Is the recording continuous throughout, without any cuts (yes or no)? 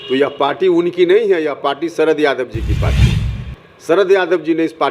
yes